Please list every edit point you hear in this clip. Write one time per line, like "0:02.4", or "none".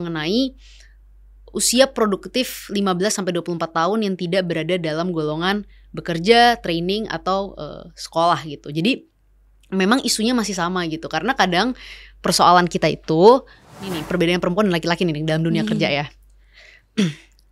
0:14.0